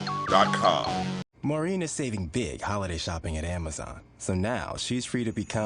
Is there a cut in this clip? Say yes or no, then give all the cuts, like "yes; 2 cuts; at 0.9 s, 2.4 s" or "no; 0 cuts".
yes; 1 cut; at 1.1 s